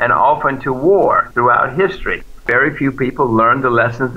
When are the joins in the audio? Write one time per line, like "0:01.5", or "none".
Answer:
0:02.5